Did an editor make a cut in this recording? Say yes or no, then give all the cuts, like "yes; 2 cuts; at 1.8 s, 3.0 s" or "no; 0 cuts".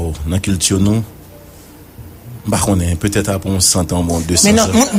no; 0 cuts